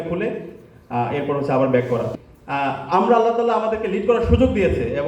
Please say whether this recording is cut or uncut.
cut